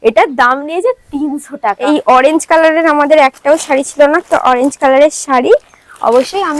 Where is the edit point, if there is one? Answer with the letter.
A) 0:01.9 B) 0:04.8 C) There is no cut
A